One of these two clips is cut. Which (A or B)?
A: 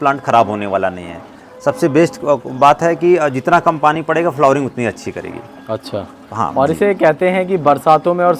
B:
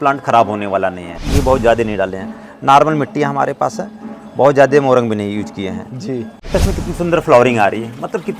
B